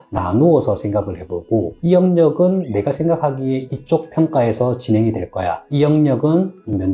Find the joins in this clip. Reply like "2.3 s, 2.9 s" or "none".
1.7 s